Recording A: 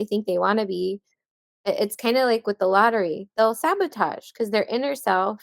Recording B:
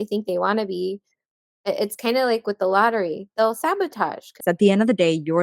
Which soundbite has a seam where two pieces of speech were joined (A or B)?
B